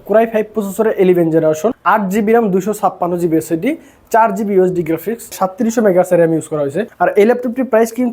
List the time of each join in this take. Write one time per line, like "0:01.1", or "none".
0:01.8
0:06.8